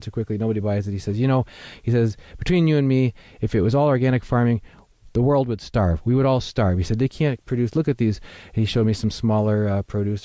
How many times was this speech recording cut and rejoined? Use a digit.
0